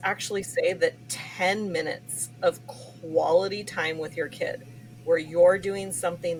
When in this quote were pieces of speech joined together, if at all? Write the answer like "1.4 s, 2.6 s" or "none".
none